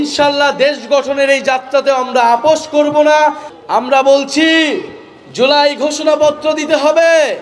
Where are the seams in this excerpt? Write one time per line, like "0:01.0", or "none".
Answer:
0:03.5